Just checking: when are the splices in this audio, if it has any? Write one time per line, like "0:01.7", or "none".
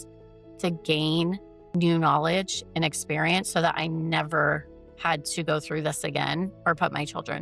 0:01.5